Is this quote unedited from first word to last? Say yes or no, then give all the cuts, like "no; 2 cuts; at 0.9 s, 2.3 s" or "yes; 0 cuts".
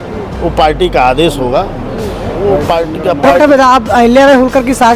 no; 1 cut; at 3.3 s